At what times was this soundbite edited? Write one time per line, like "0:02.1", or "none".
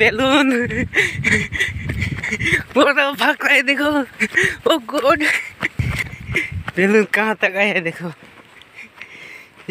0:05.8